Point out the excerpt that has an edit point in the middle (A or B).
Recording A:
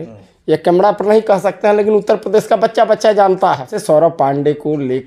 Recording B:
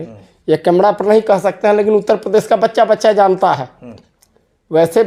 A